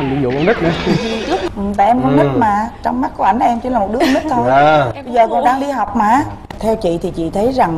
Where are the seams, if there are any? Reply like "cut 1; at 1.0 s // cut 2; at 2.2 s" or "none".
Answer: cut 1; at 1.4 s // cut 2; at 6.4 s